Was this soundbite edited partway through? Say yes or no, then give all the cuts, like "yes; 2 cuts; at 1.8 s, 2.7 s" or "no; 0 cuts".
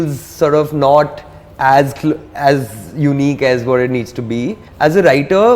yes; 1 cut; at 4.6 s